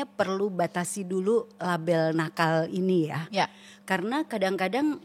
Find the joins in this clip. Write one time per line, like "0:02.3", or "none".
none